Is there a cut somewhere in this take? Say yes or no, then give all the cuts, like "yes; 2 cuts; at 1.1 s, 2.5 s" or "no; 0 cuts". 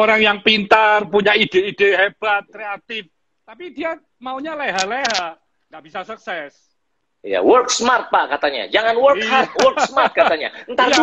no; 0 cuts